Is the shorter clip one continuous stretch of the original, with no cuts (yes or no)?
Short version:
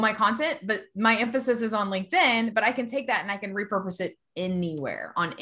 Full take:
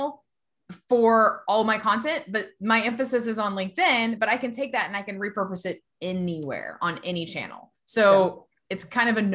yes